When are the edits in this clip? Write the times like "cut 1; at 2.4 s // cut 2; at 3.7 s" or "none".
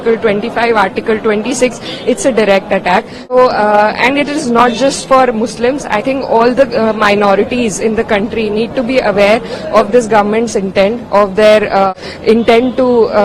cut 1; at 3.3 s // cut 2; at 11.9 s